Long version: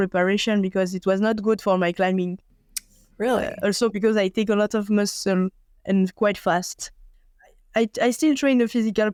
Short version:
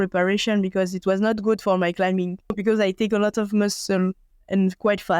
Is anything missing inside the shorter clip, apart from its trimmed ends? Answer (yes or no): yes